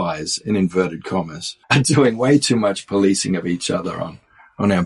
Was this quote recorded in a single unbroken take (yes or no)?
yes